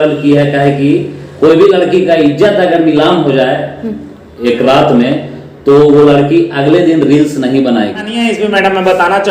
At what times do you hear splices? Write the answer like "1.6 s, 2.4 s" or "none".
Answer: 8.1 s